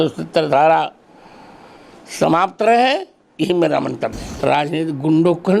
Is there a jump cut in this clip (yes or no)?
yes